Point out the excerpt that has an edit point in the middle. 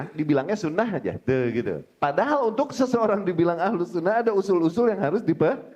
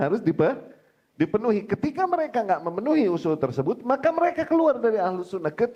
first; 1 cut; at 1.9 s

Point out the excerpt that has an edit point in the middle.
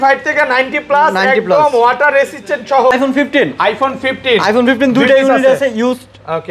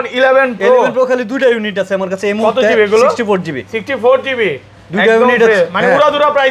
first; 1 cut; at 2.9 s

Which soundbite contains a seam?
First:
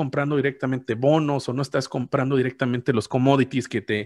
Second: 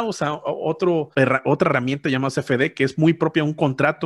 second; 1 cut; at 1.1 s

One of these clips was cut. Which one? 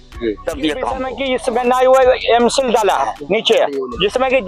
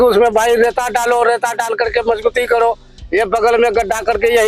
first; 1 cut; at 1.0 s

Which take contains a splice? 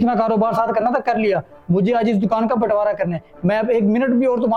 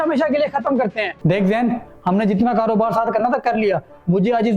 second; 1 cut; at 1.1 s

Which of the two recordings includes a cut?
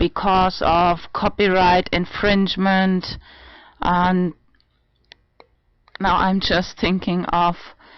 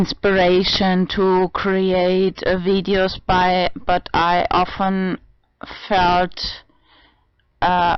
first; 1 cut; at 2.9 s

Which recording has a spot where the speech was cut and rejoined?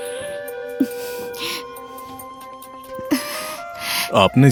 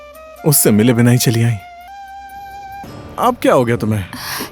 second; 1 cut; at 2.9 s

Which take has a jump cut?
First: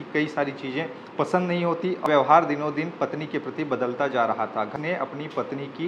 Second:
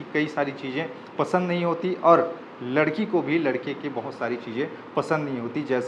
first; 2 cuts; at 2.0 s, 4.7 s

